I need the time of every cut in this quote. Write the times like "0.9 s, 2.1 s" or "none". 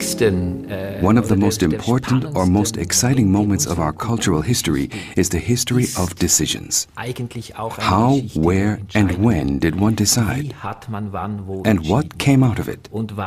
12.3 s